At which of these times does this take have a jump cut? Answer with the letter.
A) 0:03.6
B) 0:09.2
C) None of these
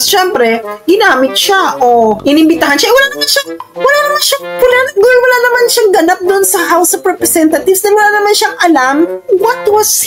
B